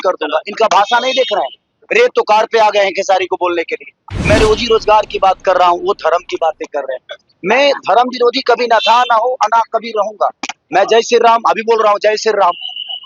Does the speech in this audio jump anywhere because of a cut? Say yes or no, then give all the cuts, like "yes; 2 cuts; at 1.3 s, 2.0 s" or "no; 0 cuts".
yes; 1 cut; at 4.1 s